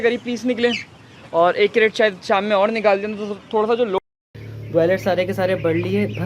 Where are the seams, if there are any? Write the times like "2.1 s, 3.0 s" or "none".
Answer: 4.0 s